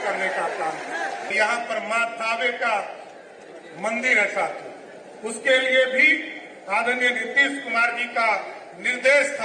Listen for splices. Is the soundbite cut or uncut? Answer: cut